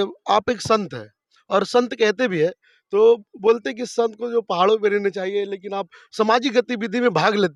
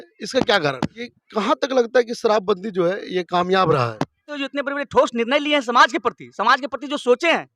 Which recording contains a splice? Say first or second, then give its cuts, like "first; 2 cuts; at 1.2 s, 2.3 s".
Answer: second; 2 cuts; at 1.0 s, 4.4 s